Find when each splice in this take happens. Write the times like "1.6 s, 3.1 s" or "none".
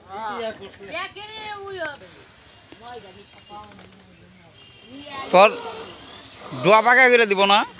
none